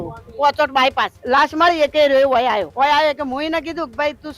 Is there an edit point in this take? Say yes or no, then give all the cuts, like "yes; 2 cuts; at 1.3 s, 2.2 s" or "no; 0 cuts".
yes; 2 cuts; at 1.2 s, 2.7 s